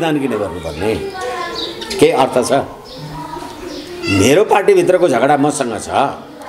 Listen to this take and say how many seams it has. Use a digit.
0